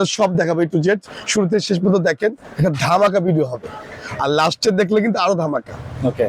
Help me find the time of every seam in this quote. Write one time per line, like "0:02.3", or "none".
none